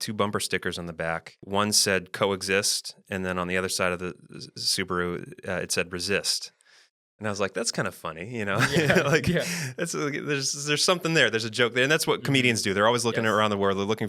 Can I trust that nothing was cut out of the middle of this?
no; 1 cut; at 1.4 s

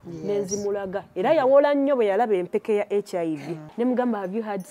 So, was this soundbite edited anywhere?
yes; 1 cut; at 3.6 s

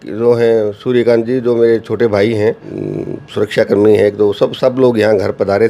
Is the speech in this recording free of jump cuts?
no; 1 cut; at 2.7 s

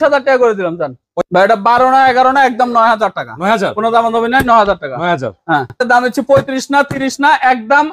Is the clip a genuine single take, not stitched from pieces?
no; 2 cuts; at 1.0 s, 5.8 s

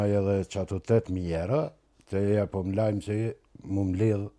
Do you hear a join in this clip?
no; 0 cuts

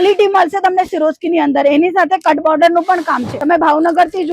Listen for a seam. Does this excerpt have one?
yes; 1 cut; at 3.3 s

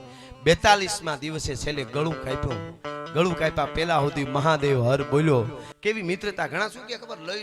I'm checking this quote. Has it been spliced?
yes; 1 cut; at 5.6 s

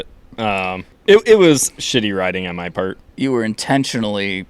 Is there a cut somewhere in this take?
yes; 2 cuts; at 0.9 s, 3.0 s

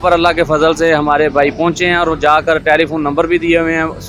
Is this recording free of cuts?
yes; 0 cuts

